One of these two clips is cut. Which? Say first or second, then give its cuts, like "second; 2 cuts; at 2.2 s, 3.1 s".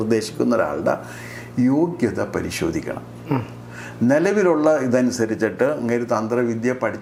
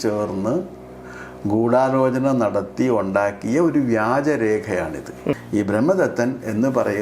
second; 1 cut; at 5.4 s